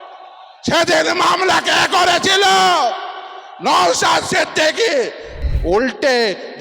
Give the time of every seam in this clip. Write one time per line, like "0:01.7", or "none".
0:05.4

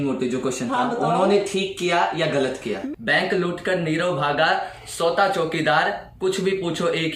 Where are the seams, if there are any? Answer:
0:02.8

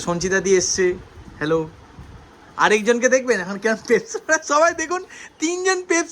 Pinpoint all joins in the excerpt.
none

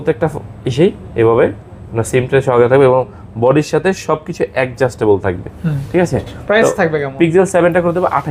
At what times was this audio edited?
none

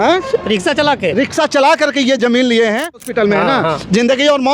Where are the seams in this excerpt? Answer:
0:03.0

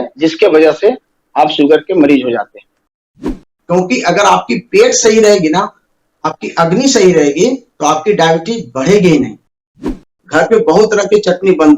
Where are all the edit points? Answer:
0:03.3
0:09.8

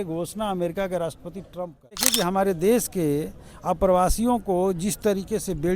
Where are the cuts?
0:02.1

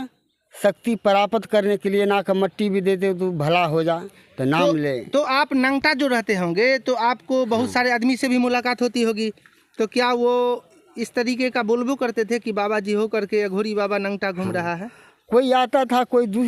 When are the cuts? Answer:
none

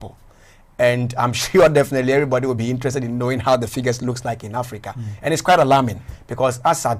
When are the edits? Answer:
none

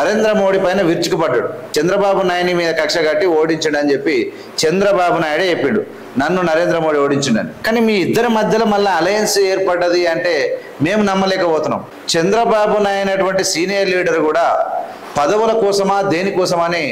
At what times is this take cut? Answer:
0:01.6
0:07.5
0:11.9

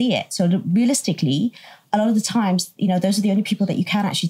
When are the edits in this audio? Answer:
none

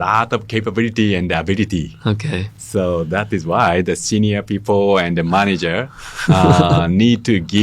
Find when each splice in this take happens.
none

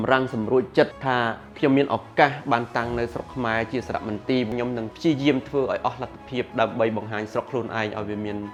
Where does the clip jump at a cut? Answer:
none

